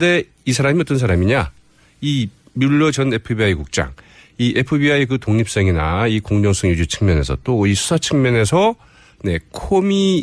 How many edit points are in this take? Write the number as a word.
one